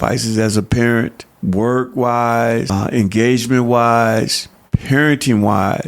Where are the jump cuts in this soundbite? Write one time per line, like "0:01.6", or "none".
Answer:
0:01.3
0:02.7